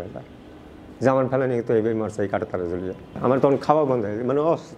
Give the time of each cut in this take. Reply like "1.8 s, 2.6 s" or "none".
3.2 s

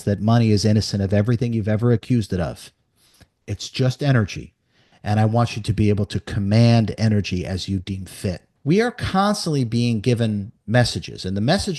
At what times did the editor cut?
8.5 s

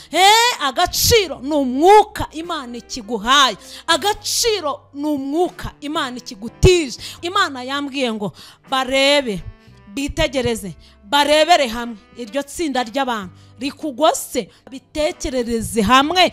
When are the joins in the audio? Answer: 7.2 s, 14.6 s

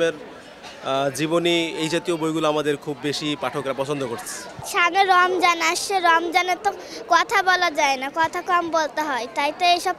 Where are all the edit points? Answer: 4.5 s

